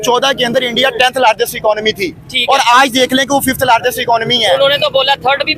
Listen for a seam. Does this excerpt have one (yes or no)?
no